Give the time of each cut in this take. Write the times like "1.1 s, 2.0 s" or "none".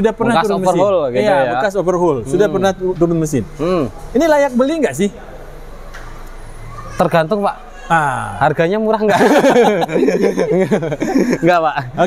none